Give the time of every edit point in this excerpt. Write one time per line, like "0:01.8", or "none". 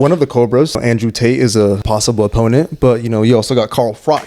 0:00.8
0:01.8